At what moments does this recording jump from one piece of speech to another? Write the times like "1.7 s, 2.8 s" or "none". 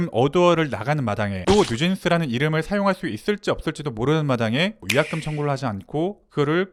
none